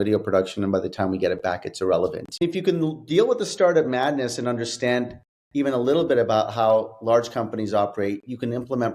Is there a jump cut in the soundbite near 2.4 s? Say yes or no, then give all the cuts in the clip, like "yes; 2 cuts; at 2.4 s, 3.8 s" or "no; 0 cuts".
yes; 1 cut; at 2.4 s